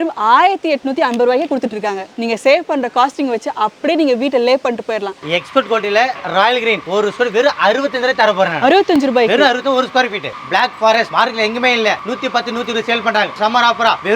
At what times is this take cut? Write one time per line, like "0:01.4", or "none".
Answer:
0:02.1
0:05.2
0:06.8
0:10.3
0:13.4